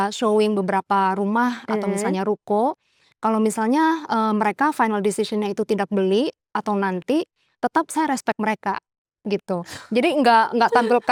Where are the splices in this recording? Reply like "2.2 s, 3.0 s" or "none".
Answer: none